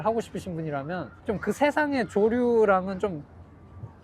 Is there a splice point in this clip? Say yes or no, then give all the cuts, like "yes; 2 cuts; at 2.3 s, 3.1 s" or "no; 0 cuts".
yes; 1 cut; at 1.1 s